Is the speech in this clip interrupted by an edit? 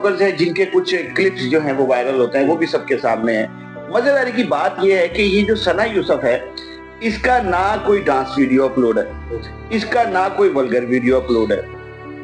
no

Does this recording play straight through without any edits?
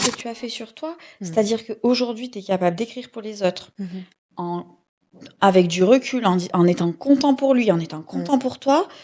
yes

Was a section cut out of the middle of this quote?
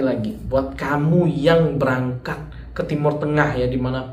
no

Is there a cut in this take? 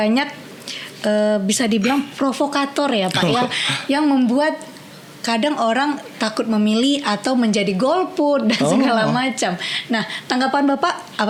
no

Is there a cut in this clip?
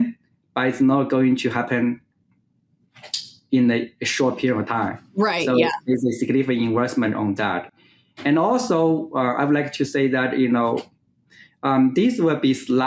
no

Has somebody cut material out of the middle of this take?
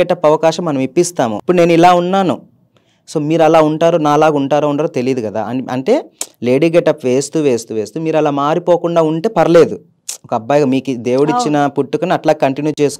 yes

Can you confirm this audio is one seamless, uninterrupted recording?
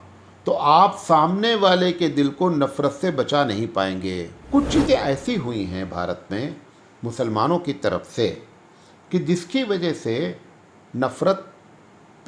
no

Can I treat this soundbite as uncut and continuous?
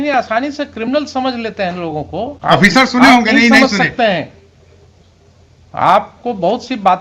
no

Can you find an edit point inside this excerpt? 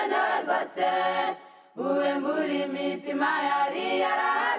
yes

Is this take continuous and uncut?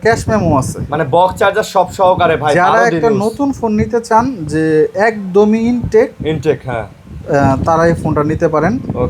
yes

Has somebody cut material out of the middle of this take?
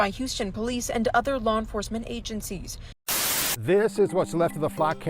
yes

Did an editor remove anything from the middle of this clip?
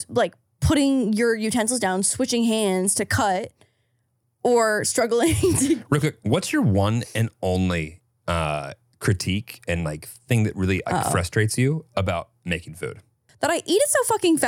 yes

